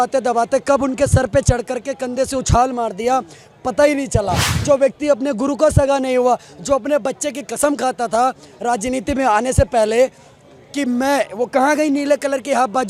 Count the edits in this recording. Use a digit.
0